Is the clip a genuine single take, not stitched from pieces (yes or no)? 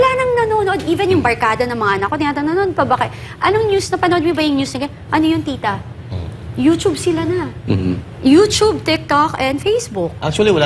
yes